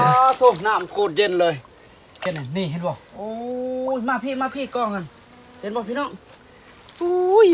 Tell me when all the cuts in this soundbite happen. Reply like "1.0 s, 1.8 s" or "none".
2.2 s